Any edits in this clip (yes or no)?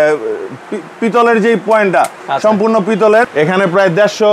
yes